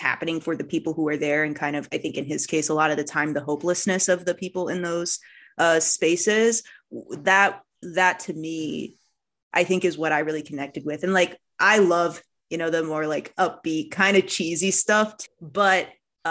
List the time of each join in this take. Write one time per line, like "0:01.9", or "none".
0:15.2